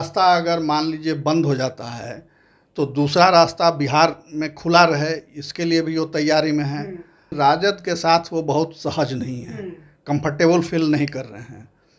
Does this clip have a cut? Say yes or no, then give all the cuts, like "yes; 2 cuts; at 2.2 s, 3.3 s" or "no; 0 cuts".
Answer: yes; 1 cut; at 7.3 s